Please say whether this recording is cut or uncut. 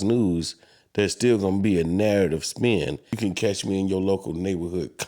cut